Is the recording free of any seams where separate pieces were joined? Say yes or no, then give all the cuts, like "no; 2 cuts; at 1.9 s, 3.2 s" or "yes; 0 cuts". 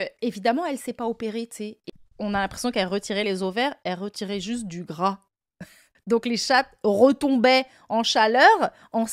no; 1 cut; at 1.8 s